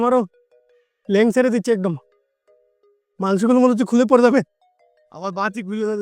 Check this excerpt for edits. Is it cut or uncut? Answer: uncut